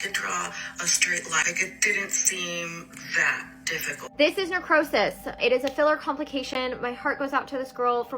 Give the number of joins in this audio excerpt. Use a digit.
3